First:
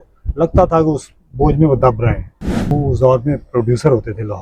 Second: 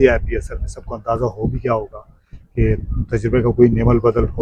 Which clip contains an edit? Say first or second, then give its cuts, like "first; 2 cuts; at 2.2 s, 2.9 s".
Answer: first; 1 cut; at 2.7 s